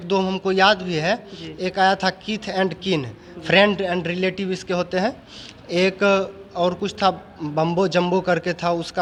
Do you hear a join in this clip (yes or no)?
no